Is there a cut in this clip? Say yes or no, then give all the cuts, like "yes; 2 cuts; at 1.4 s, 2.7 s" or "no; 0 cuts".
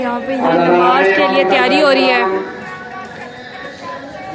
no; 0 cuts